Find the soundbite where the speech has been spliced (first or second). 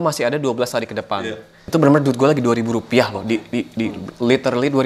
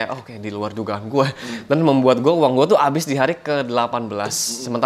first